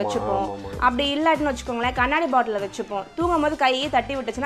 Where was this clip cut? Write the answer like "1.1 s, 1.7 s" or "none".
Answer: none